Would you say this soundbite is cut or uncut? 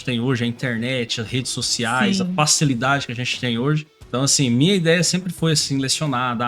cut